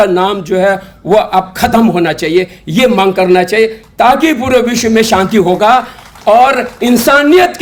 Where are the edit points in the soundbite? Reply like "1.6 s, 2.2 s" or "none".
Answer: none

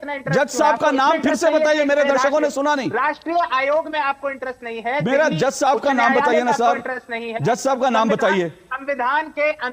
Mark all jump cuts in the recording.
none

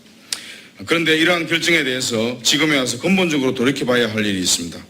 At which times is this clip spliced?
none

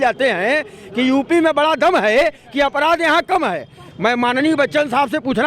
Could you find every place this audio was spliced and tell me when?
none

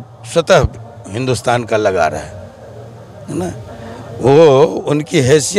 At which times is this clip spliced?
none

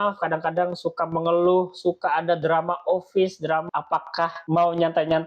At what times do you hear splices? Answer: 3.6 s

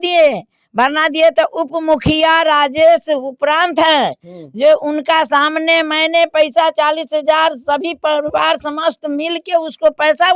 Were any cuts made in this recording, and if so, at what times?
none

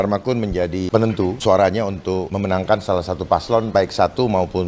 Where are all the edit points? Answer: 0.9 s, 2.3 s, 3.7 s

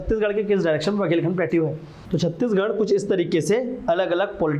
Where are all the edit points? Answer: 1.9 s

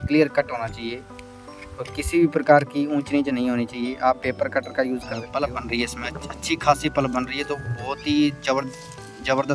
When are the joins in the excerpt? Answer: 5.2 s

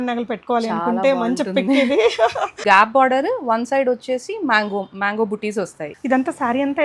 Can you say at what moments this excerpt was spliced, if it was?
2.5 s, 5.9 s

